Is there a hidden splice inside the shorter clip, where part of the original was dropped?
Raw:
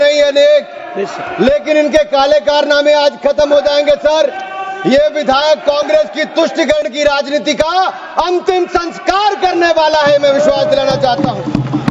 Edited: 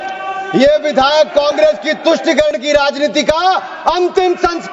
no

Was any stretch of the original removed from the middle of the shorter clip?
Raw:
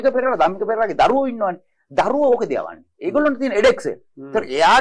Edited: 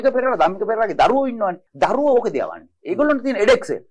yes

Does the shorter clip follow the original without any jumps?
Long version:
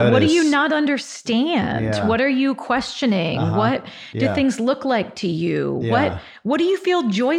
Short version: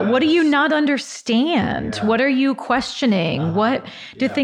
yes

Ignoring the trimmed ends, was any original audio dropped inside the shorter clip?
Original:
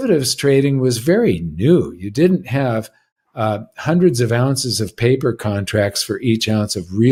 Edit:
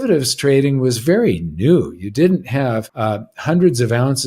yes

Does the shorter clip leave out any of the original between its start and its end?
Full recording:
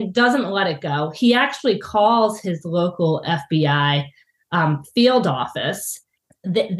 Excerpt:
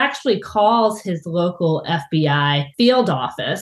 yes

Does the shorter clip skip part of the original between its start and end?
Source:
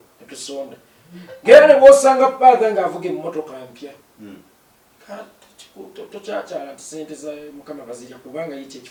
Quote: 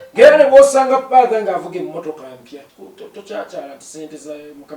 yes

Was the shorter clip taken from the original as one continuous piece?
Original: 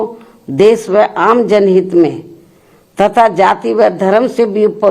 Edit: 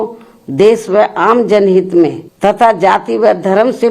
no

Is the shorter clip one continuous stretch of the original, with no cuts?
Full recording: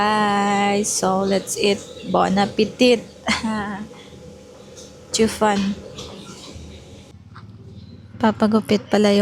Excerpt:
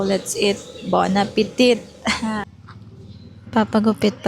no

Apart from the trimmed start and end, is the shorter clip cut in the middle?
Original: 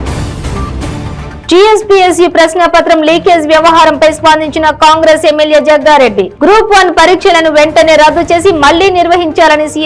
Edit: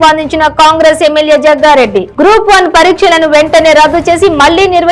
no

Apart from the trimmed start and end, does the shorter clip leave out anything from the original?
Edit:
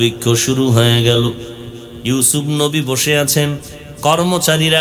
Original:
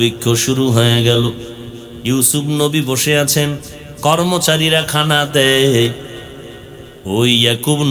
no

